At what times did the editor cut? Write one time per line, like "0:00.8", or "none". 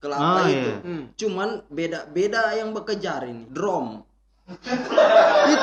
0:03.4